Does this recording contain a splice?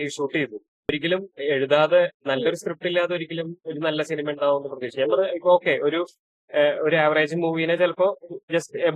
yes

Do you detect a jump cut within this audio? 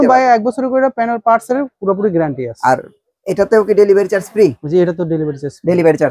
no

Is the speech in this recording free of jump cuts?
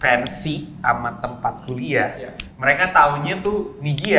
yes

